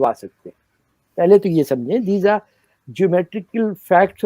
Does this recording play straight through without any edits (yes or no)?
yes